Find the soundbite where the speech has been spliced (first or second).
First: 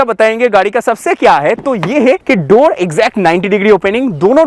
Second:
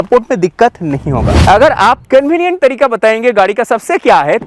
second